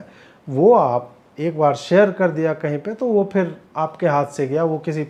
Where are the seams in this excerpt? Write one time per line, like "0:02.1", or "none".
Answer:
none